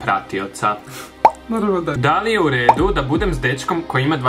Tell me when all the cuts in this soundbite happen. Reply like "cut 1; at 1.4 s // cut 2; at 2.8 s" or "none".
cut 1; at 2.0 s